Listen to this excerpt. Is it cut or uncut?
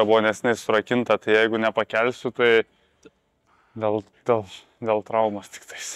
uncut